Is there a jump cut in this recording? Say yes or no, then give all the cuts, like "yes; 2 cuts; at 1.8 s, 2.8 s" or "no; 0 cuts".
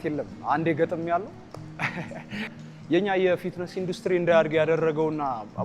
yes; 1 cut; at 2.5 s